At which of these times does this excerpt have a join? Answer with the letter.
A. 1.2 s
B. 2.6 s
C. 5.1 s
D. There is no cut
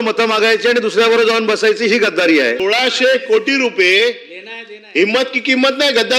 B